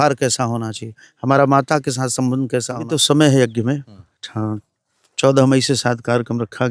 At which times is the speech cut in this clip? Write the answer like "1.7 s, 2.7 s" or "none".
2.8 s

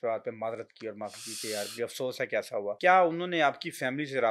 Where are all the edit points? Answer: 2.8 s

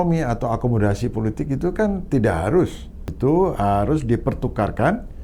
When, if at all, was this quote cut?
3.1 s

